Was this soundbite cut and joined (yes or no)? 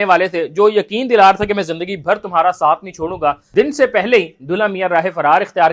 yes